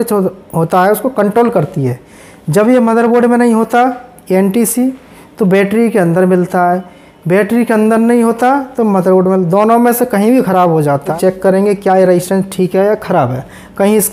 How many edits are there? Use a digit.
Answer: 1